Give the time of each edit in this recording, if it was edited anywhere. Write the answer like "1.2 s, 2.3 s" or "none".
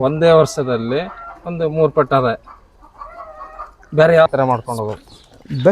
4.3 s